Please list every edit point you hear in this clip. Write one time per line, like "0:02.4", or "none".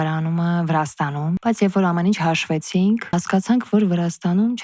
0:01.4
0:03.1